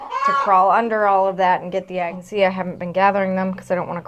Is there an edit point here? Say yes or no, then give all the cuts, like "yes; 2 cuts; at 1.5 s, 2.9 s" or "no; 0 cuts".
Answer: yes; 1 cut; at 2.2 s